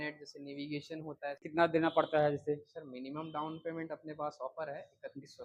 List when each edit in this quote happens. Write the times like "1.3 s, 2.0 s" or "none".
1.4 s